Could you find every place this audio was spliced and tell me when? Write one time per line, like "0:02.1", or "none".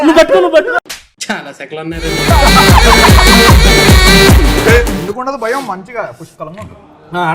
none